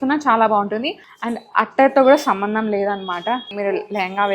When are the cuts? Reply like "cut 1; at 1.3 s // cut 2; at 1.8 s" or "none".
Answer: none

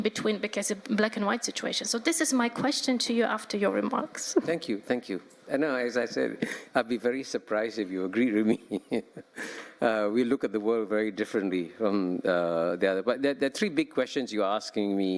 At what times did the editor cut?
none

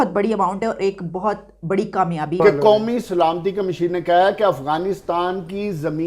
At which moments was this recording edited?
cut 1; at 2.3 s

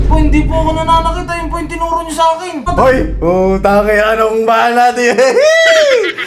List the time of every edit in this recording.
cut 1; at 2.7 s

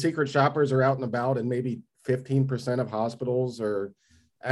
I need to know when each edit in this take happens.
none

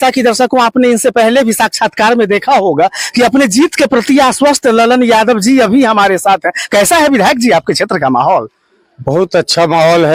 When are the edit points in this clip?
none

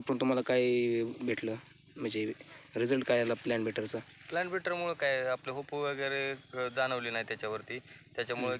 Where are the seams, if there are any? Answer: none

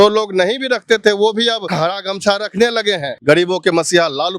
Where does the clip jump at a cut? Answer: cut 1; at 1.7 s // cut 2; at 3.1 s

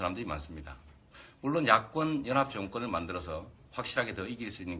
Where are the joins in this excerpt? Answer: cut 1; at 3.0 s

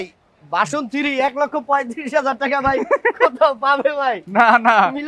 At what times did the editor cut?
none

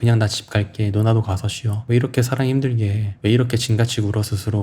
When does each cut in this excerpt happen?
cut 1; at 1.7 s

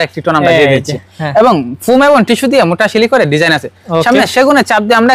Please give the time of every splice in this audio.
none

